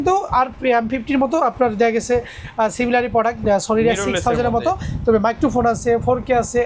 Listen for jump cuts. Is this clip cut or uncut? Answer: uncut